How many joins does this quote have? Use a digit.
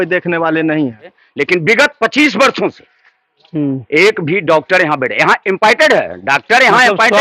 1